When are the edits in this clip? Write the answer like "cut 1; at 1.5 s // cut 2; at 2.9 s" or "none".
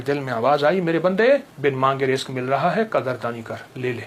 cut 1; at 1.5 s

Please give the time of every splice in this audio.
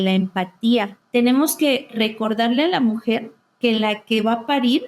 cut 1; at 1.0 s

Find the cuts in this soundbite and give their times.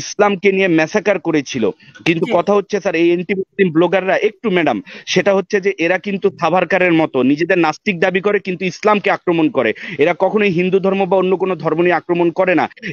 none

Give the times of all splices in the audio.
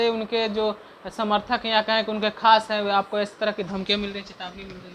none

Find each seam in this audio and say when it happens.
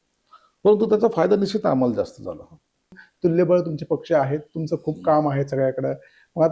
cut 1; at 3.0 s

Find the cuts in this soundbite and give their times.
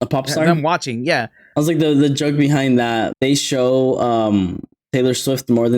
cut 1; at 1.4 s // cut 2; at 3.1 s

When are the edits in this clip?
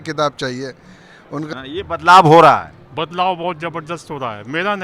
cut 1; at 1.5 s

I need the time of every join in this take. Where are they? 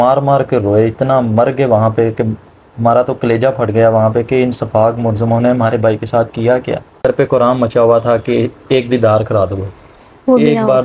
cut 1; at 7.0 s

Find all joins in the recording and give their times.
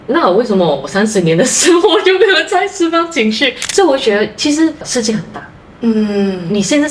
cut 1; at 3.6 s

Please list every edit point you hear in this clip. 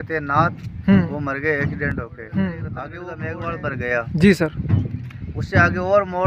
cut 1; at 3.0 s

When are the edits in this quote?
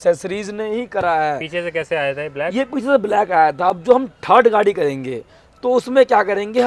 none

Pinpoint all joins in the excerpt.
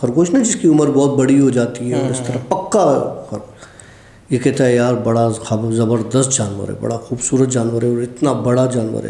none

